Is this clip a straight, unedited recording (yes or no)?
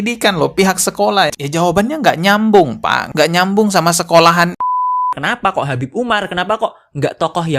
no